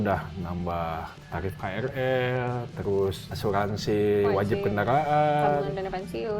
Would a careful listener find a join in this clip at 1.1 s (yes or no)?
yes